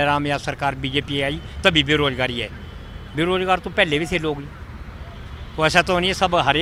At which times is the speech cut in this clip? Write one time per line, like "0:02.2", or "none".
none